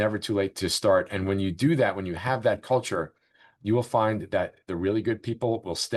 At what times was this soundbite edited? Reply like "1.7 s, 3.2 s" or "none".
none